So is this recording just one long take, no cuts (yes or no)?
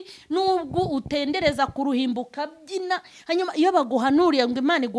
yes